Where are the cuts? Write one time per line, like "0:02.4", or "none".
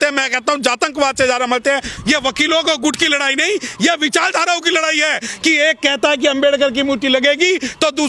0:01.9